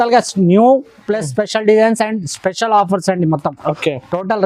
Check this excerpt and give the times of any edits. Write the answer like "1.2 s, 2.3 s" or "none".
none